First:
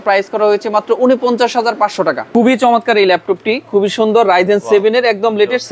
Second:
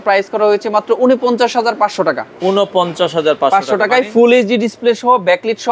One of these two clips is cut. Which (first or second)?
first